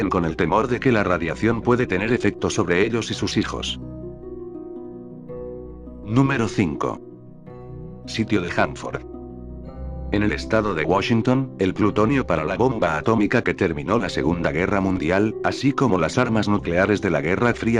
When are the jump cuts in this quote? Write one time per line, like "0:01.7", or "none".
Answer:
0:06.3